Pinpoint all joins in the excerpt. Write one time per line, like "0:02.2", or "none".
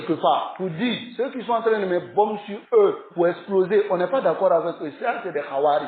0:01.1